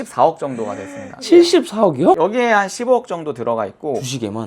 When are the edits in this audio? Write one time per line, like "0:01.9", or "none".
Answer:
0:02.2